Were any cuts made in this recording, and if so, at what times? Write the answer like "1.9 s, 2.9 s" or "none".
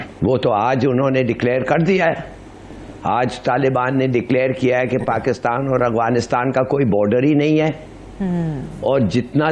none

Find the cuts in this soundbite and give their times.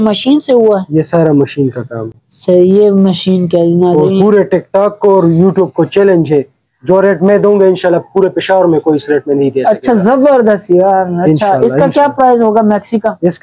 none

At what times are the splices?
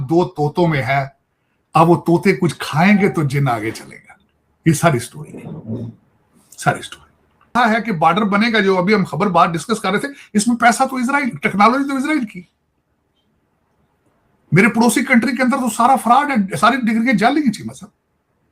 7.5 s

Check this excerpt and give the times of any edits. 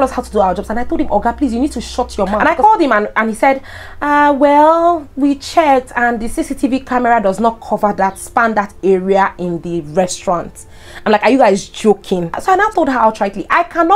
2.4 s, 12.4 s

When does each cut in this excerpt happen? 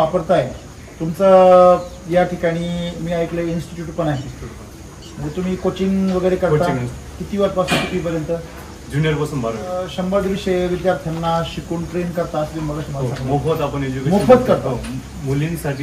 none

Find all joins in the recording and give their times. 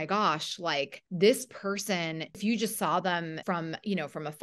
1.0 s, 2.3 s, 3.4 s

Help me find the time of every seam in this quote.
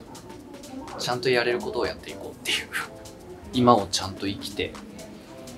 3.4 s

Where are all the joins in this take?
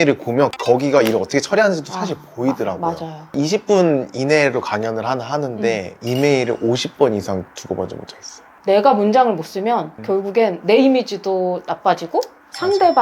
3.3 s, 8.4 s

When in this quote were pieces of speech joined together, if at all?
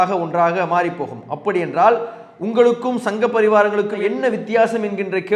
none

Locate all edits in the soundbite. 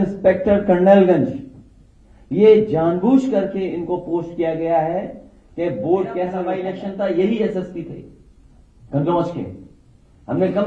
6.4 s

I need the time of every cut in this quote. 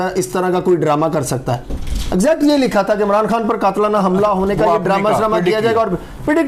none

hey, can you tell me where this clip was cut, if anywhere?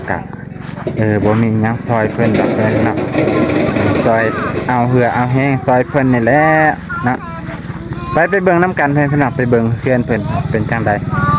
none

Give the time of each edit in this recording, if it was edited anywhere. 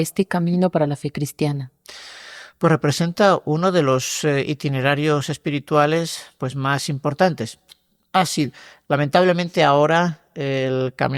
none

